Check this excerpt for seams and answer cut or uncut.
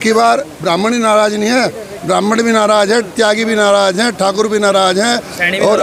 uncut